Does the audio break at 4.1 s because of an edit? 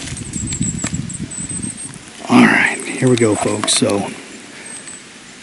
no; 1 cut; at 1.9 s

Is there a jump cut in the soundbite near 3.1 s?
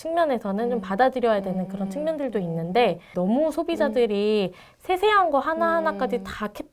yes; 1 cut; at 3.1 s

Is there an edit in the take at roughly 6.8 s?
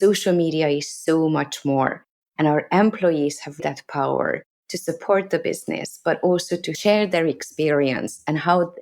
yes; 2 cuts; at 3.6 s, 6.8 s

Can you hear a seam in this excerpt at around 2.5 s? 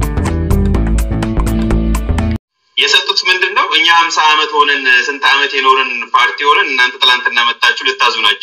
yes; 1 cut; at 2.5 s

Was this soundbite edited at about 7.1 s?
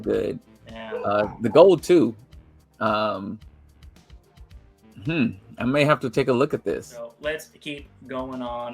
yes; 1 cut; at 7.1 s

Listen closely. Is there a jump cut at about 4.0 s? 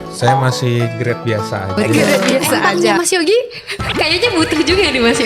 no; 1 cut; at 2.6 s

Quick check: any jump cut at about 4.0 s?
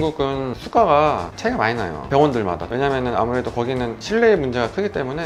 no; 1 cut; at 2.6 s

